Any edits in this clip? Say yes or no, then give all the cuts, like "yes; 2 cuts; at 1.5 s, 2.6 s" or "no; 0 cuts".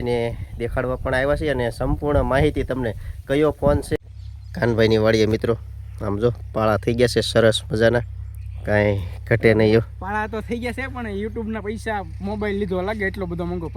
yes; 1 cut; at 3.9 s